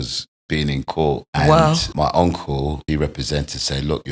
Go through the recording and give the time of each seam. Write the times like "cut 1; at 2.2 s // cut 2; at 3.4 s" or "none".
cut 1; at 1.3 s // cut 2; at 1.9 s // cut 3; at 2.8 s